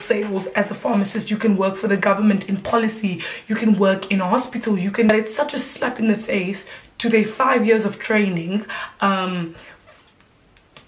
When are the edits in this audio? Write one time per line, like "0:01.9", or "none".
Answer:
0:05.1